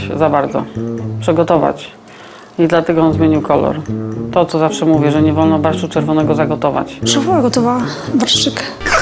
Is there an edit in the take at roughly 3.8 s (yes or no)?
no